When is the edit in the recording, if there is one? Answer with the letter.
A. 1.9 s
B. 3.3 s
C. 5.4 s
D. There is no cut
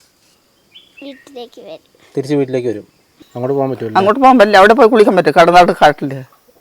B